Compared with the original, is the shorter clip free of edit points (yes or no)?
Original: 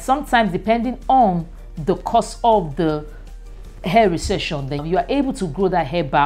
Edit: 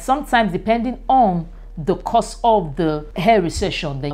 no